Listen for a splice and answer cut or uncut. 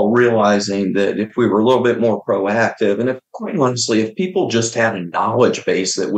uncut